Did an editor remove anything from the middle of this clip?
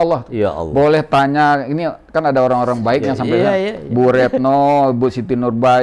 no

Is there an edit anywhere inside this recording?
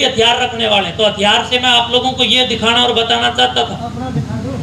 no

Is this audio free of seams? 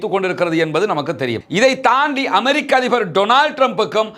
no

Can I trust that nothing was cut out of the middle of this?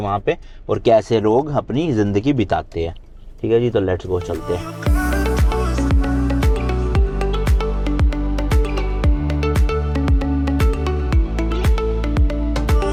yes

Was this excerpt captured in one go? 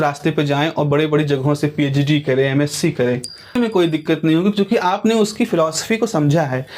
no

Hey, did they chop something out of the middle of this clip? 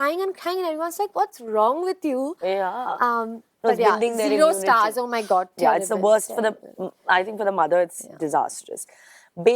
no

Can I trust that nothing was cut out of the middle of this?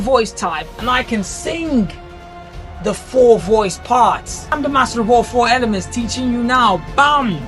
no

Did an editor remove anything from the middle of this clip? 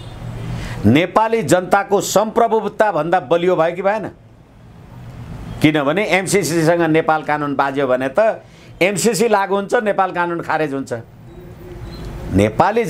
no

